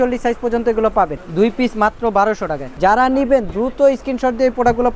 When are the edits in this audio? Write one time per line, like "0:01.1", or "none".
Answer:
0:01.2
0:02.7